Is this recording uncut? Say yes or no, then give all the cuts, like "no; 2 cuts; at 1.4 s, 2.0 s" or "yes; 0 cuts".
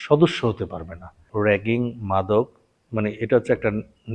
no; 1 cut; at 1.2 s